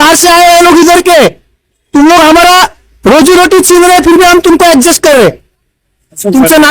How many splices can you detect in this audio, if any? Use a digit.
1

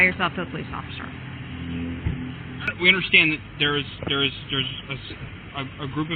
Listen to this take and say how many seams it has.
1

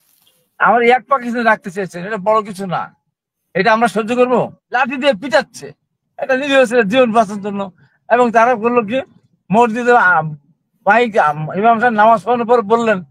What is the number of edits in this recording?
1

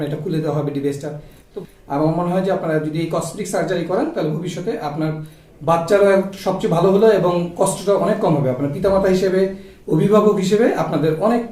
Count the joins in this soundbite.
1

